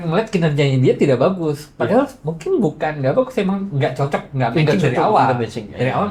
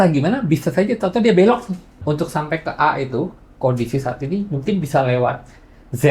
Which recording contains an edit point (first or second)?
second